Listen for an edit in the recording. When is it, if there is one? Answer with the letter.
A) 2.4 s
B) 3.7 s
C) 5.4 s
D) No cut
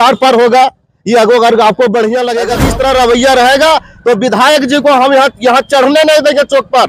A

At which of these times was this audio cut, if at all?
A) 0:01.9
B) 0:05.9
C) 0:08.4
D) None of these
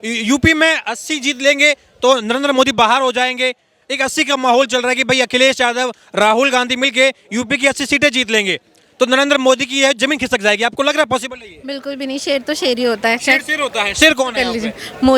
D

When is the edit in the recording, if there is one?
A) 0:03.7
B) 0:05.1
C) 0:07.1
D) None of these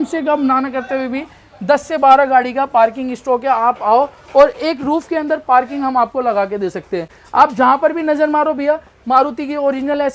D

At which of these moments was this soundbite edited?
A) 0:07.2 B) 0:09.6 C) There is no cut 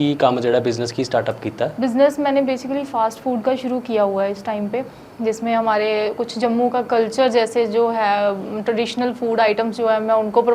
C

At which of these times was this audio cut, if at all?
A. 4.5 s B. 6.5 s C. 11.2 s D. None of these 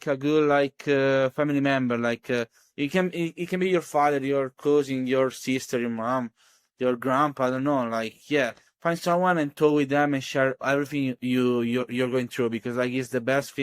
C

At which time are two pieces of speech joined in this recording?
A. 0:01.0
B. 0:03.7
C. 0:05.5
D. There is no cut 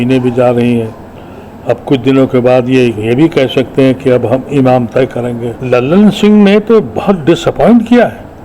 C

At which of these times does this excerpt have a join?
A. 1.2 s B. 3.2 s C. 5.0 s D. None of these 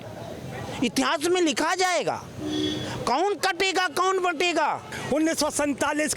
C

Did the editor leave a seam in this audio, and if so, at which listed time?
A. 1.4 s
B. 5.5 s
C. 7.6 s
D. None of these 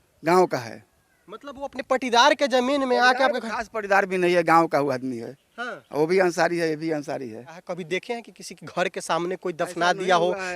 C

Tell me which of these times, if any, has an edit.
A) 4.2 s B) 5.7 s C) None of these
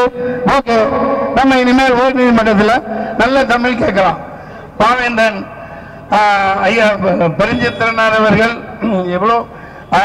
C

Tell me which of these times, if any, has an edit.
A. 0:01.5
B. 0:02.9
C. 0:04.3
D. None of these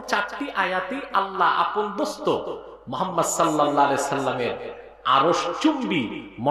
D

